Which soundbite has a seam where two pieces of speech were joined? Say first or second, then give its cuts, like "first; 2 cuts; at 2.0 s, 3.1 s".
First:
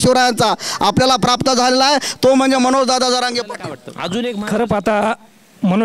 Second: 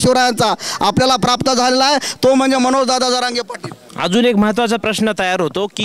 first; 1 cut; at 4.3 s